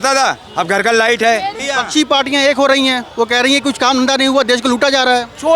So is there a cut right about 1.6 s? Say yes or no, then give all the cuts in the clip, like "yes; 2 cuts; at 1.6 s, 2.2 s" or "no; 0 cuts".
yes; 1 cut; at 1.6 s